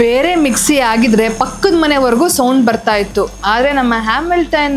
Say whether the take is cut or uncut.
uncut